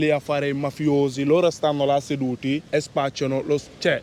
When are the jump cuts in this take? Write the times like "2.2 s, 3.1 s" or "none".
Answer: none